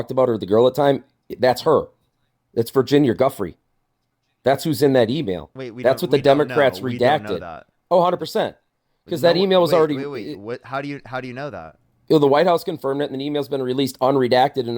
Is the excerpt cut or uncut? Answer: uncut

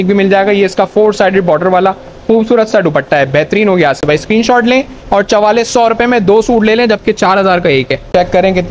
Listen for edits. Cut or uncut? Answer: uncut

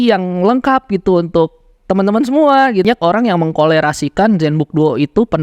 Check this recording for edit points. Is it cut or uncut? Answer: cut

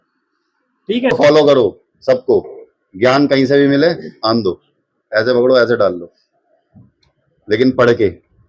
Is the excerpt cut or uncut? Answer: cut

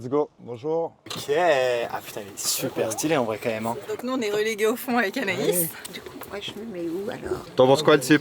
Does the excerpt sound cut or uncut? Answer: cut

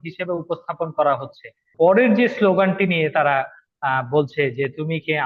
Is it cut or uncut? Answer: cut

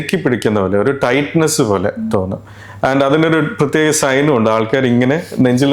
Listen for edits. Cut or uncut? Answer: uncut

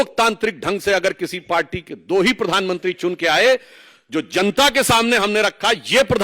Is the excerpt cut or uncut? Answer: uncut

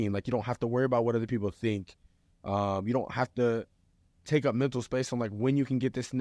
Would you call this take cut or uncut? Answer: uncut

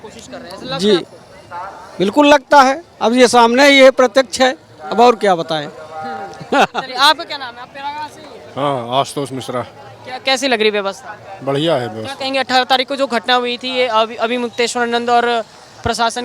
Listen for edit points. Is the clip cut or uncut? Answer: uncut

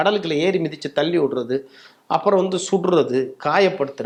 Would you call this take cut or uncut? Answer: uncut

